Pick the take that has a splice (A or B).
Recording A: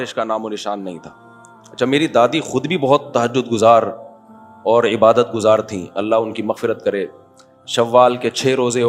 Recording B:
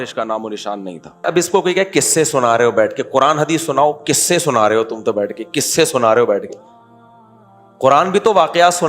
B